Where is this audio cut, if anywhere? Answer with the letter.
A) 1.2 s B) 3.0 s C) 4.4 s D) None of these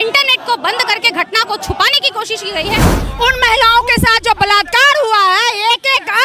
B